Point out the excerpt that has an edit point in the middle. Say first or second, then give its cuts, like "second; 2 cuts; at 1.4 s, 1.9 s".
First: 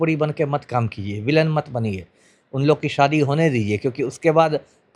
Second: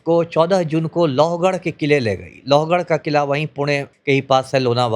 second; 1 cut; at 3.9 s